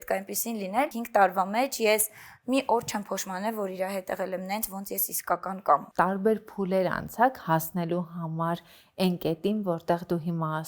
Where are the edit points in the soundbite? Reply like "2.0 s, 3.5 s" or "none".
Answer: 1.0 s, 5.9 s